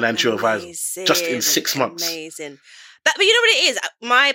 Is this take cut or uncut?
uncut